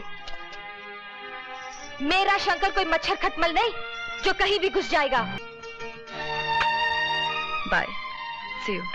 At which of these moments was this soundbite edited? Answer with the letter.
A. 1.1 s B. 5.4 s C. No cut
B